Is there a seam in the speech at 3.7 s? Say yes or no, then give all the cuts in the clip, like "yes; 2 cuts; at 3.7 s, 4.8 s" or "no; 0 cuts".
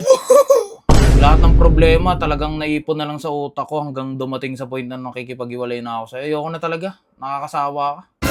no; 0 cuts